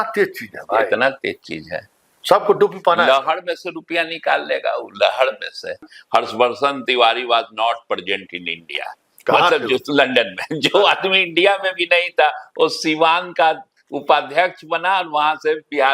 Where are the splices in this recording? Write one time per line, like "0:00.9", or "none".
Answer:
0:05.9

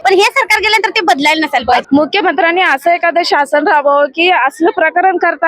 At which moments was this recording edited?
0:01.8

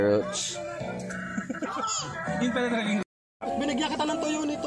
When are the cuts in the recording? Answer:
0:03.2

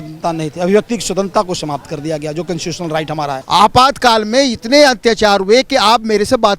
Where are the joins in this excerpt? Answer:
0:03.4

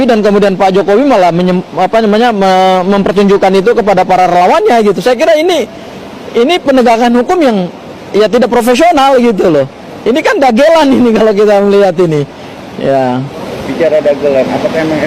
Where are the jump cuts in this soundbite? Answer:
none

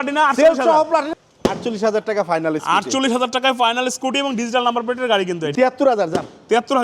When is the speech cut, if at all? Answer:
0:01.1
0:05.5

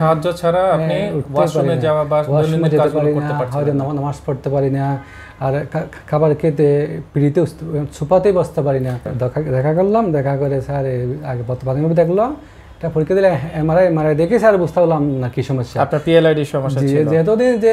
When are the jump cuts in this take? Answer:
0:09.1

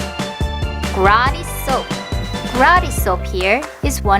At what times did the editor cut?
0:01.5

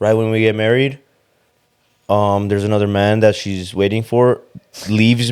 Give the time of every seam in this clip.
none

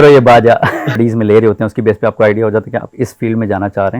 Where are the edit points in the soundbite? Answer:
0:01.0

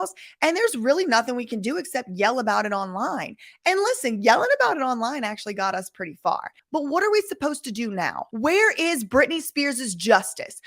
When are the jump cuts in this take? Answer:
0:06.5
0:08.2

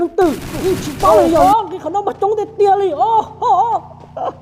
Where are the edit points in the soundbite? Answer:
0:01.4

